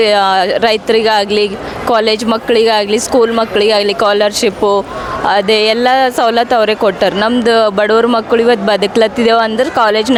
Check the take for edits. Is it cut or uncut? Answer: uncut